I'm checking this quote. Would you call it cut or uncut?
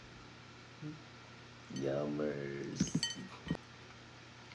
cut